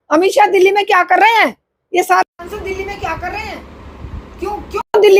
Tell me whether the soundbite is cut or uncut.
uncut